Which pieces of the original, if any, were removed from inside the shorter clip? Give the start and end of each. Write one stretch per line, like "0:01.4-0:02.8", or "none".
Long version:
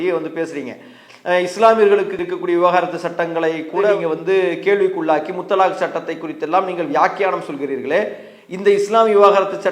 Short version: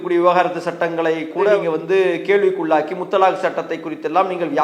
none